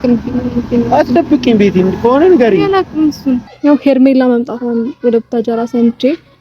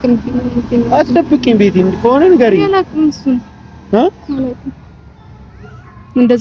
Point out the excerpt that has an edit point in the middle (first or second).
first